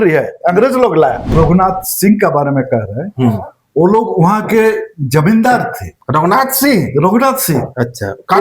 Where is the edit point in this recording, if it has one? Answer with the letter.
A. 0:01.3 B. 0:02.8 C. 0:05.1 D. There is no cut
A